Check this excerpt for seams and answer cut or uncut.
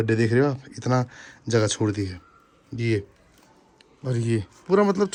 uncut